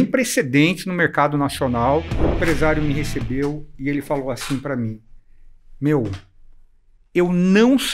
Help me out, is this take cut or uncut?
cut